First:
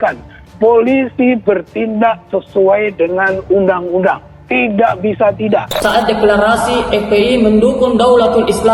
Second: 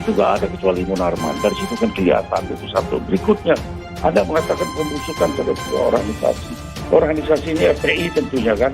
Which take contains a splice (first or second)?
first